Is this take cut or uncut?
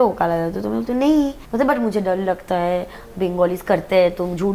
cut